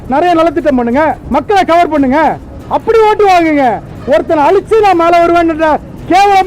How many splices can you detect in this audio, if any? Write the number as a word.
zero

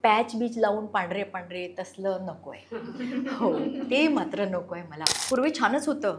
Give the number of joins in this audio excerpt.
one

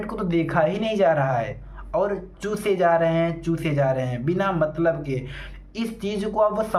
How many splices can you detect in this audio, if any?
zero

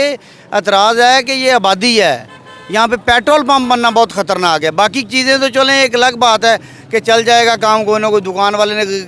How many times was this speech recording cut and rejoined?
zero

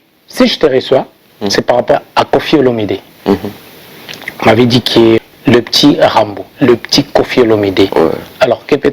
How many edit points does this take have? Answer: two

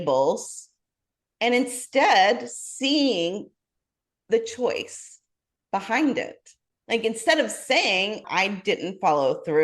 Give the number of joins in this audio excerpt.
one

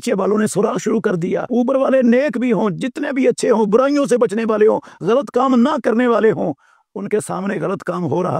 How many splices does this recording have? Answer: one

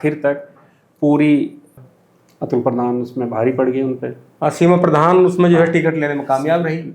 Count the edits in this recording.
one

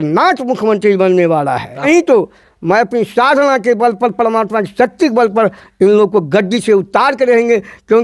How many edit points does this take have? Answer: one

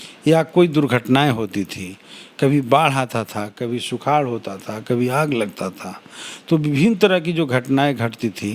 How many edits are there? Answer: zero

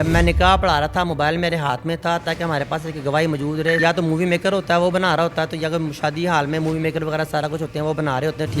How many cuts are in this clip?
one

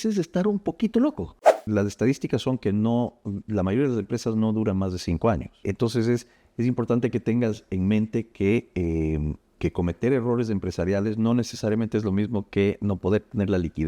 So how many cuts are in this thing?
two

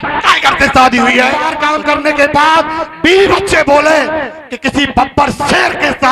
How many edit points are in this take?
one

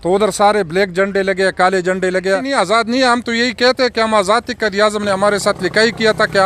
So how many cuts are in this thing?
one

